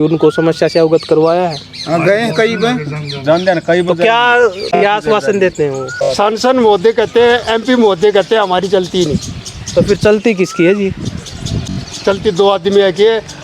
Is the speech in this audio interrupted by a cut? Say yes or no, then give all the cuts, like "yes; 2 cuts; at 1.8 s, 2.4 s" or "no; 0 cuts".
yes; 1 cut; at 6.0 s